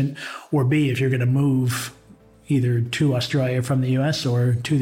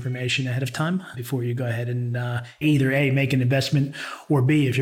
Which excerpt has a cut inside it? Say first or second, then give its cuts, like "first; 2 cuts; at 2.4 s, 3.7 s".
second; 2 cuts; at 1.2 s, 2.6 s